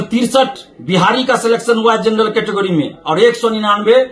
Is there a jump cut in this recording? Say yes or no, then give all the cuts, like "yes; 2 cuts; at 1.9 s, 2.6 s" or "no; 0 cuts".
no; 0 cuts